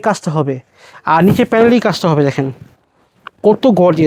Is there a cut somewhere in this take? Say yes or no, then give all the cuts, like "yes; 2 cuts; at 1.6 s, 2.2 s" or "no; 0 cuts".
no; 0 cuts